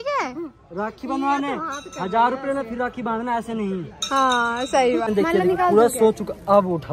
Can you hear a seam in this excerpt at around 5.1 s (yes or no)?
yes